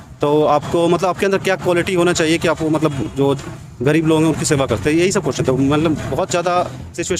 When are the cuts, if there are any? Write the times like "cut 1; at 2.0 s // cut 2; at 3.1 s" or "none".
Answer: none